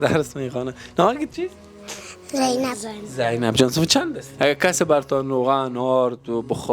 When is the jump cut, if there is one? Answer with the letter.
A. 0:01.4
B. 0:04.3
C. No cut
B